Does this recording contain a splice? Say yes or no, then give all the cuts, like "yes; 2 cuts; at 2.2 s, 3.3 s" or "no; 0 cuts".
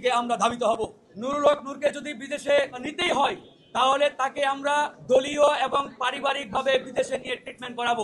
yes; 1 cut; at 1.1 s